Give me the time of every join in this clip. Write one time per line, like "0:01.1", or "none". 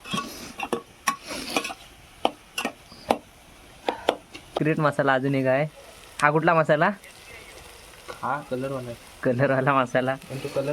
0:04.6